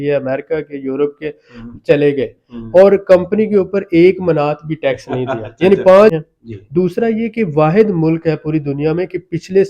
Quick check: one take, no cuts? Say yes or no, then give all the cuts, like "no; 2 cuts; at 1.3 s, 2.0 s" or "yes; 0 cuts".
no; 1 cut; at 6.2 s